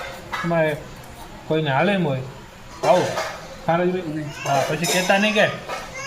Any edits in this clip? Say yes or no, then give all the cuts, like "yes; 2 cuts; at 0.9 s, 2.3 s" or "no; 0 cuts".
yes; 1 cut; at 4.1 s